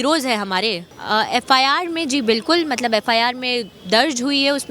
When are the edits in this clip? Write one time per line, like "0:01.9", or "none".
0:00.9